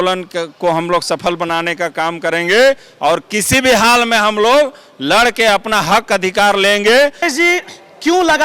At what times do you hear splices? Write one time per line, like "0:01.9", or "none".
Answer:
0:07.2